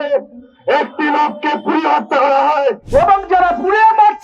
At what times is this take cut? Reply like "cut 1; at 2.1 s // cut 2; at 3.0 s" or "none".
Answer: cut 1; at 2.8 s